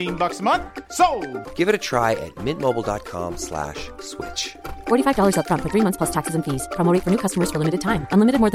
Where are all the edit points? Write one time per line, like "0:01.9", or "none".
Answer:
none